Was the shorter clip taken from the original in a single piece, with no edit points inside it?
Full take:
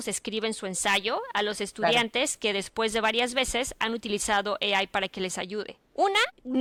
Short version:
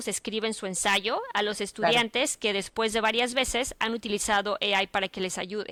yes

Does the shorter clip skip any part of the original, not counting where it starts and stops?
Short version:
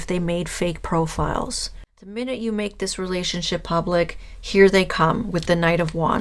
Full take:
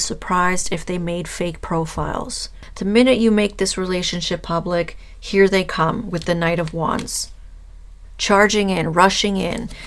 no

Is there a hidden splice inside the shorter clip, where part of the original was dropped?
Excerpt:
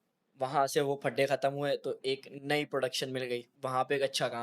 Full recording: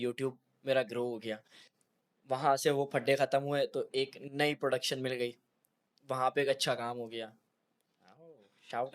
yes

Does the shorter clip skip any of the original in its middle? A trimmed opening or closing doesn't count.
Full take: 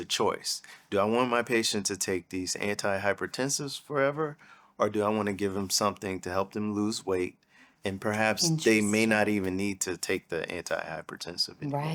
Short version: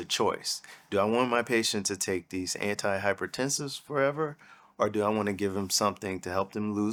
no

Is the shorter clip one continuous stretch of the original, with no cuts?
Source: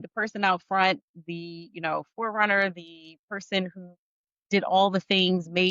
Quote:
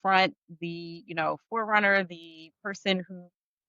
yes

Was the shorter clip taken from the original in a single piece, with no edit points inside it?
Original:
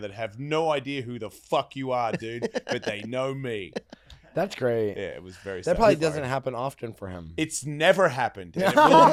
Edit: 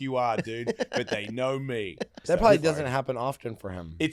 no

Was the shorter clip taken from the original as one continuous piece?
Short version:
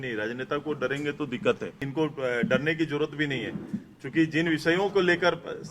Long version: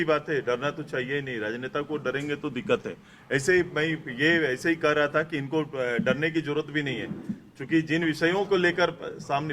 no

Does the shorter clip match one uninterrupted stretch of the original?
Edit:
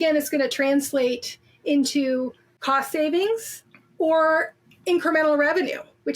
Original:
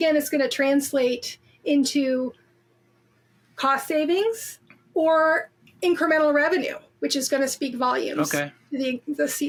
no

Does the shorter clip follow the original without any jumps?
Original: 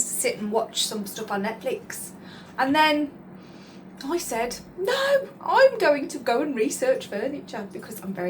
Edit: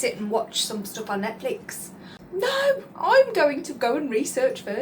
no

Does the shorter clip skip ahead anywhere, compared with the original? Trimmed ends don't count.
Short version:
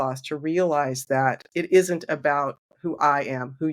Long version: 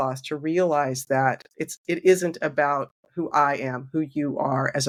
yes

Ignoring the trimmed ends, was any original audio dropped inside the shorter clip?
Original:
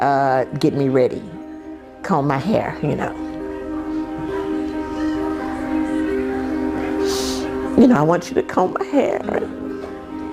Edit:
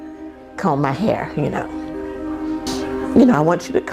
yes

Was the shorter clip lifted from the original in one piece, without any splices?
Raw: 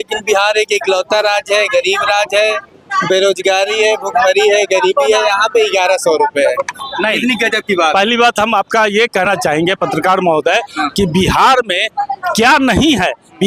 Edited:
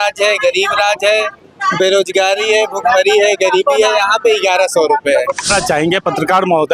no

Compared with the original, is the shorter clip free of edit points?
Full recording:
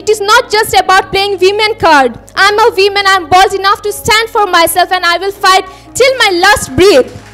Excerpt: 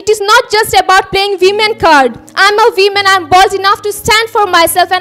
yes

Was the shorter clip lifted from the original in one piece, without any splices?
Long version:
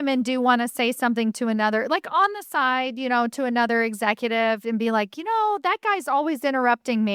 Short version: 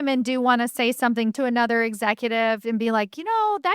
no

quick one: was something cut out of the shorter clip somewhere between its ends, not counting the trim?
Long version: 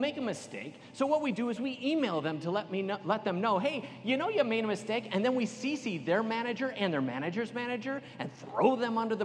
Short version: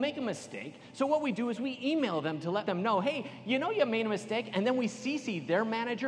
yes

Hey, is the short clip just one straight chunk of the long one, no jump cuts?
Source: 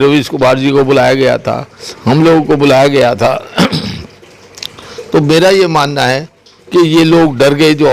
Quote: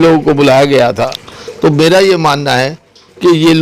no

